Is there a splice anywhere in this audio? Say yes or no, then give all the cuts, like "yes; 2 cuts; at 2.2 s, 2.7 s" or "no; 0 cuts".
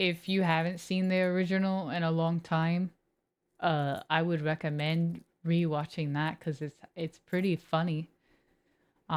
no; 0 cuts